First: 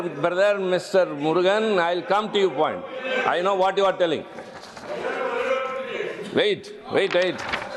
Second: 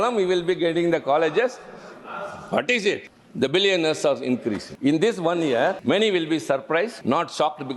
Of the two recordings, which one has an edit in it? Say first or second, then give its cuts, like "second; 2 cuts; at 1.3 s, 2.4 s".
second; 4 cuts; at 3.2 s, 4.7 s, 5.8 s, 7.0 s